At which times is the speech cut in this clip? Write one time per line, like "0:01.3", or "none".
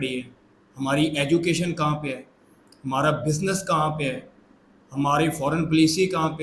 none